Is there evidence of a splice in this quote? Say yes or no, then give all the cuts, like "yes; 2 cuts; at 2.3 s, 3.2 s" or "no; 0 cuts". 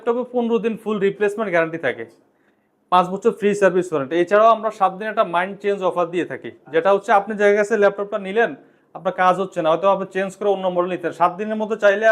no; 0 cuts